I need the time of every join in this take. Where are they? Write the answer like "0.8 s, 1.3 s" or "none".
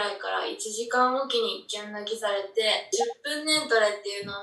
2.9 s